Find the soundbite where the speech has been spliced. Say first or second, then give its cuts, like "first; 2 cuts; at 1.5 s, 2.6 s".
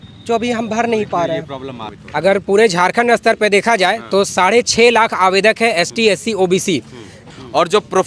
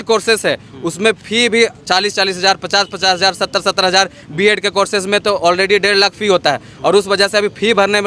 first; 2 cuts; at 1.9 s, 7.3 s